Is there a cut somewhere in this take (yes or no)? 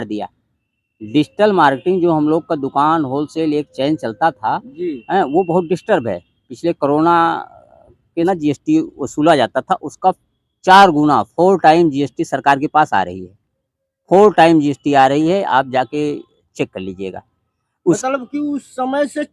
yes